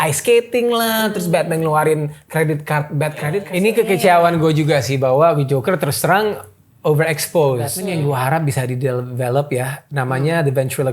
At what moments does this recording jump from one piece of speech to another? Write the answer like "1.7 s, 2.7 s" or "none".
3.5 s, 7.8 s